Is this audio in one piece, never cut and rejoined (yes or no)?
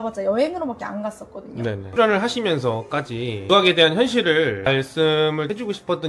no